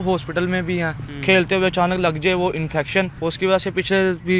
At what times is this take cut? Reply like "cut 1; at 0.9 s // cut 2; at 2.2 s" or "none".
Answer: cut 1; at 1.0 s // cut 2; at 3.1 s